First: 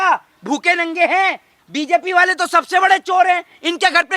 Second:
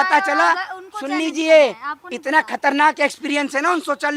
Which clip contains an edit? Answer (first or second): first